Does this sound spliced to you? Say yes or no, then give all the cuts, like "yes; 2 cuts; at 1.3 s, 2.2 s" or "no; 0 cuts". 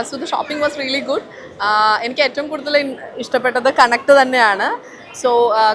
no; 0 cuts